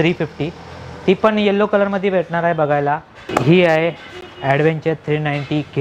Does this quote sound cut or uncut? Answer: cut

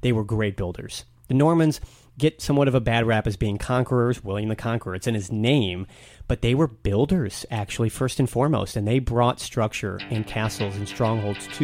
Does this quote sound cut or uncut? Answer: uncut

